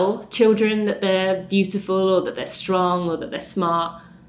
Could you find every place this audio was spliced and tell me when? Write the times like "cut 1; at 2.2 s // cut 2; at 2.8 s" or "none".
none